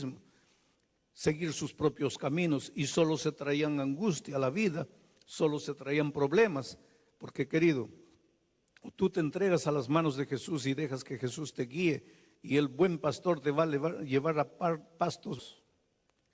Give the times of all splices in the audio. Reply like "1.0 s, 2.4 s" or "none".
none